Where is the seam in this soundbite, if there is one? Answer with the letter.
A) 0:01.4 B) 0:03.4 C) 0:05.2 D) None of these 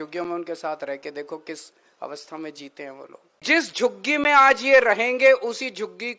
B